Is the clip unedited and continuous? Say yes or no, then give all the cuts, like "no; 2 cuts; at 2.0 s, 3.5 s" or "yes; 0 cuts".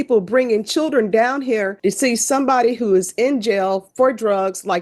no; 1 cut; at 1.7 s